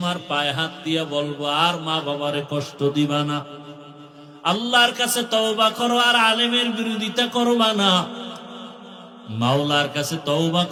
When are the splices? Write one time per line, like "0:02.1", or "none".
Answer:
none